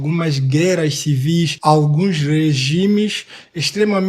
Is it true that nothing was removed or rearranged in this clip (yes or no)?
no